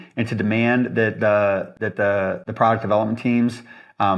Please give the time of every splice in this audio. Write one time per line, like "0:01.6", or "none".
none